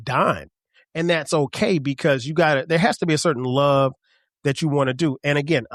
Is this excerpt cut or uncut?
uncut